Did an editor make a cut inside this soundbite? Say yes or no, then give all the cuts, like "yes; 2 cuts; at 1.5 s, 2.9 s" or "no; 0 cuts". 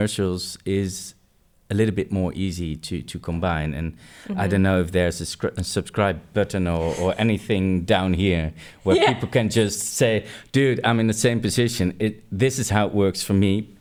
no; 0 cuts